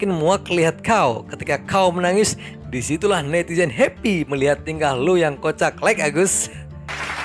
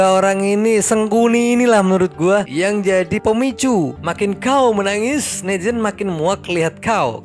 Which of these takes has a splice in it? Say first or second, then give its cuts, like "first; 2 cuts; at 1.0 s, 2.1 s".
second; 1 cut; at 3.9 s